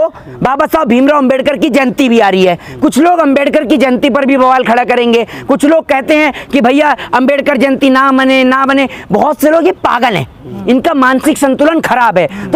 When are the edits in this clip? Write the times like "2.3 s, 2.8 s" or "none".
none